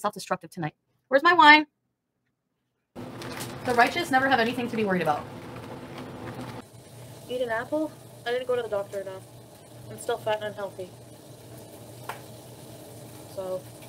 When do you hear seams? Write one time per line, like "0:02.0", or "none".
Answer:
0:03.0
0:06.5